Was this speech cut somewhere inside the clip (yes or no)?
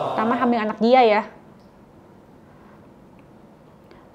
no